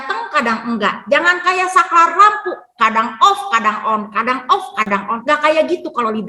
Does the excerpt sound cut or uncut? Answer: cut